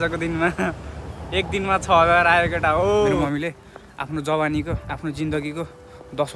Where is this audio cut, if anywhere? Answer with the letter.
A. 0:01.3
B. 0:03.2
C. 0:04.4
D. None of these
B